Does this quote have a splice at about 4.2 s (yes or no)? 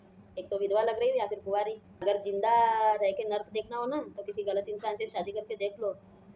no